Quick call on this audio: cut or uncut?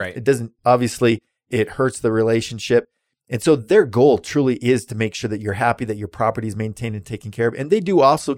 uncut